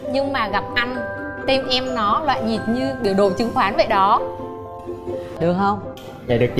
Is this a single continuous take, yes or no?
no